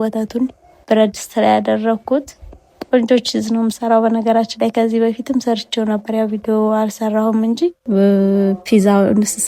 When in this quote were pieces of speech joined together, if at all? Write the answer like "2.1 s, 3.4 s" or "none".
7.8 s